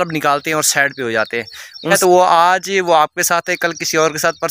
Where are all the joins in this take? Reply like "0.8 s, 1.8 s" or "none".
1.9 s